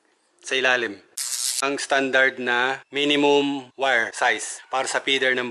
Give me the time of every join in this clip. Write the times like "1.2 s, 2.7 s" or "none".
1.5 s, 2.8 s, 4.3 s